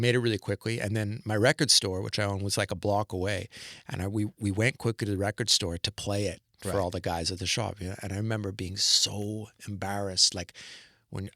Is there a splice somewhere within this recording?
no; 0 cuts

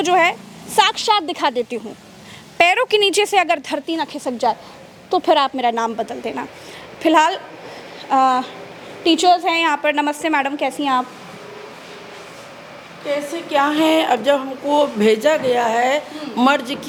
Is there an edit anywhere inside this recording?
no; 0 cuts

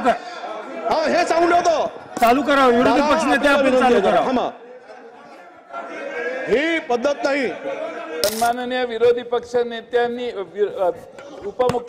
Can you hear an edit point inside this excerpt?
yes; 1 cut; at 8.2 s

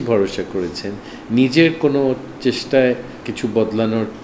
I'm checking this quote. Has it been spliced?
yes; 1 cut; at 3.2 s

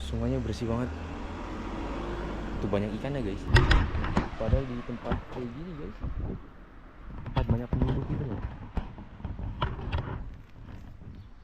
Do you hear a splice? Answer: yes; 1 cut; at 3.5 s

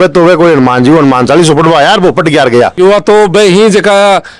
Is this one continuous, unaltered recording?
yes; 0 cuts

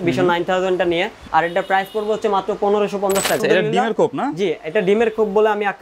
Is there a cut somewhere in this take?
yes; 2 cuts; at 1.2 s, 3.4 s

